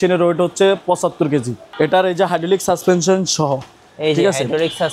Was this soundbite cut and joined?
yes; 1 cut; at 1.6 s

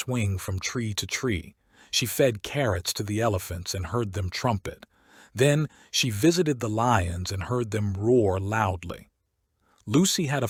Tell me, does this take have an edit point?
no; 0 cuts

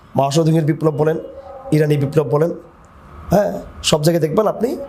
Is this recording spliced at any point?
no; 0 cuts

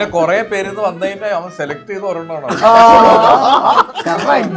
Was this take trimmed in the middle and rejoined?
no; 0 cuts

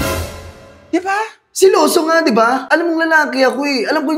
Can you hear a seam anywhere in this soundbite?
yes; 1 cut; at 2.6 s

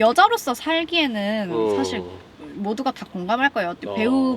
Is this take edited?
no; 0 cuts

